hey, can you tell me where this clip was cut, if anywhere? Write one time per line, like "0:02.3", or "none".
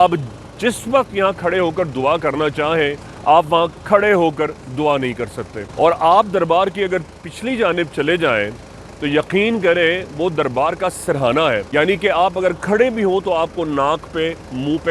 0:05.6
0:11.7